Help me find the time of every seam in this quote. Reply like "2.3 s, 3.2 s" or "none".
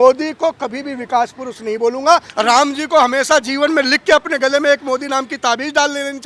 2.3 s